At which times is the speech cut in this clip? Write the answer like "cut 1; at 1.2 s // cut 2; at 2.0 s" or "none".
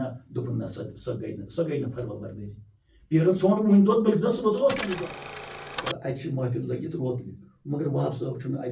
cut 1; at 5.3 s